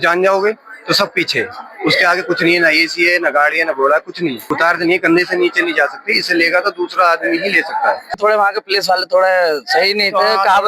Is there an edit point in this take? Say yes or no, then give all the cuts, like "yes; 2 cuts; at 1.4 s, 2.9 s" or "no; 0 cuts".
yes; 2 cuts; at 4.4 s, 8.1 s